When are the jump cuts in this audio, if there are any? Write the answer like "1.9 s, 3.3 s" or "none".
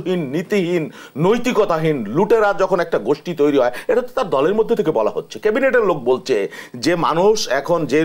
none